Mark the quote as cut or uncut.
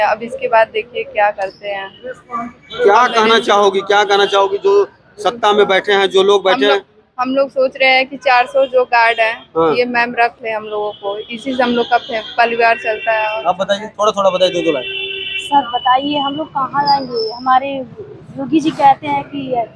uncut